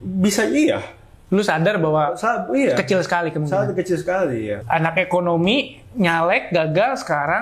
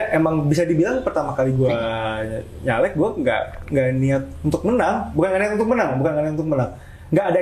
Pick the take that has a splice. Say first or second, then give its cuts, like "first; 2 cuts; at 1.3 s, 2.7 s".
first; 1 cut; at 4.6 s